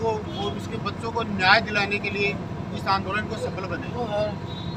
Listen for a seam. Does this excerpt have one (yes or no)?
no